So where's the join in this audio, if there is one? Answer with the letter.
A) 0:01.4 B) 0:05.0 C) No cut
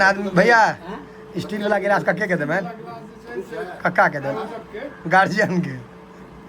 C